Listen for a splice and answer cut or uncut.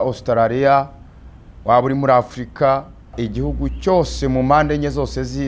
cut